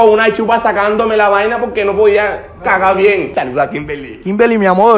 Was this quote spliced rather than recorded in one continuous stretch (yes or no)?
yes